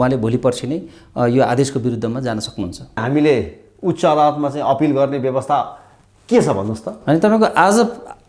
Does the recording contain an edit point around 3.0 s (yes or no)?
yes